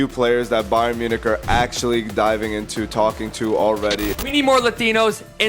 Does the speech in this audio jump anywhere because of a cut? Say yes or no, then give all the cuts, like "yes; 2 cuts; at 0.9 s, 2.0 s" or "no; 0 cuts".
yes; 1 cut; at 4.1 s